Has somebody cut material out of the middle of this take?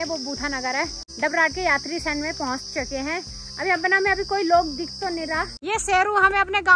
yes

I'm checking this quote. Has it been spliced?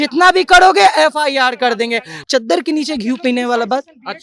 yes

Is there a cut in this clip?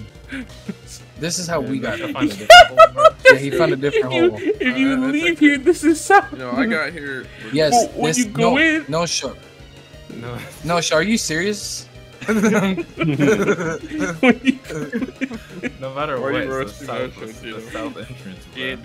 no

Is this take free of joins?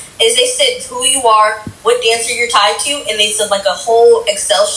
yes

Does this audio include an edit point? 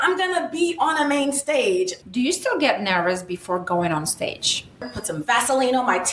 yes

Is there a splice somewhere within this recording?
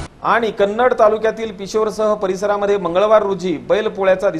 no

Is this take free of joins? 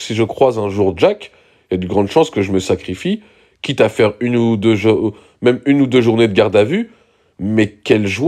yes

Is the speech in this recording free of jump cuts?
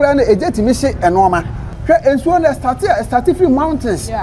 no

